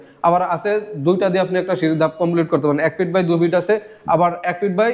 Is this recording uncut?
yes; 0 cuts

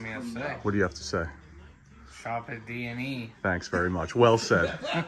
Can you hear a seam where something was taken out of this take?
no; 0 cuts

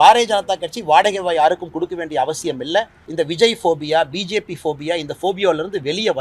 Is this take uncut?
no; 1 cut; at 3.0 s

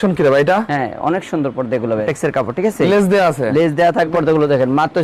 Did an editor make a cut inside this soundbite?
yes; 2 cuts; at 2.0 s, 4.1 s

